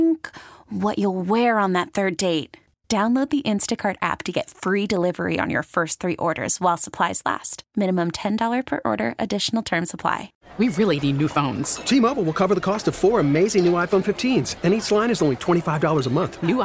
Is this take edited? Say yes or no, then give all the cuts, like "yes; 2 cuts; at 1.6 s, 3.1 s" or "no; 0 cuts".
yes; 1 cut; at 10.3 s